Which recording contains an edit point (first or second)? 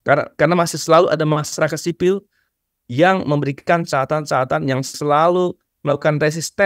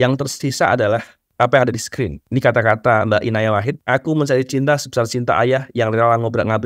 second